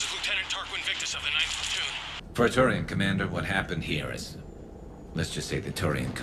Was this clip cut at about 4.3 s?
no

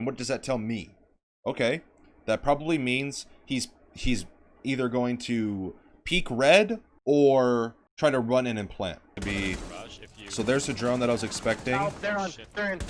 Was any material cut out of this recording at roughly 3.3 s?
no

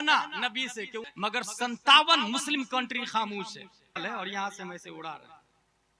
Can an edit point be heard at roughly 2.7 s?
no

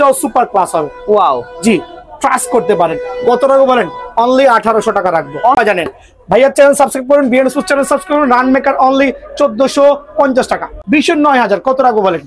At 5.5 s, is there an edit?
yes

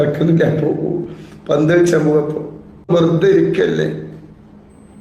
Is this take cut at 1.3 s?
no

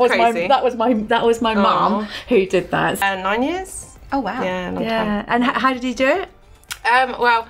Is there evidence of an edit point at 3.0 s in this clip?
yes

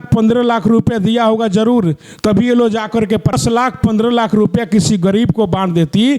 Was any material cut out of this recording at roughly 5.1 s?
no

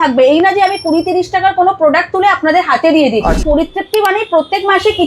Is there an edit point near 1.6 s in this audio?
no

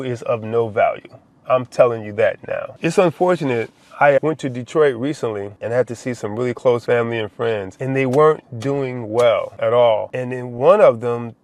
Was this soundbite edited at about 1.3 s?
no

